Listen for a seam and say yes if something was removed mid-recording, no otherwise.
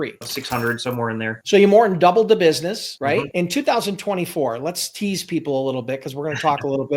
yes